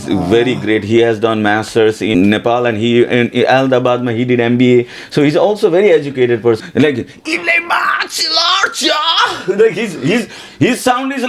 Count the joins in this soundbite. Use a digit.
2